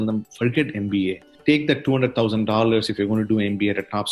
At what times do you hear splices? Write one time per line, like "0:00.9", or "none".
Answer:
0:01.3